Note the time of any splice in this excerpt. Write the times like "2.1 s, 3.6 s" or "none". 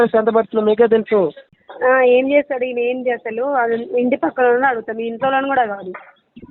1.5 s